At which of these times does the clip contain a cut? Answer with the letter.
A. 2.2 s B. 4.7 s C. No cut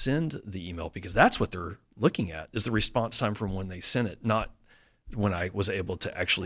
C